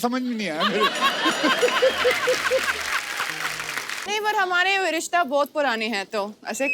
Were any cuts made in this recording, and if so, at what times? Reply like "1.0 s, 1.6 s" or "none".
4.0 s